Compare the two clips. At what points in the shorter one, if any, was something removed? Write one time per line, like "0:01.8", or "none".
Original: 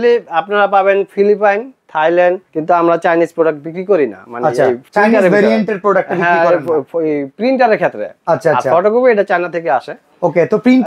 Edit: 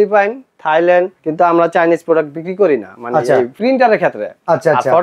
0:03.5